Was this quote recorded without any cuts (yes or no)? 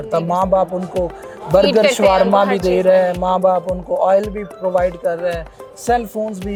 yes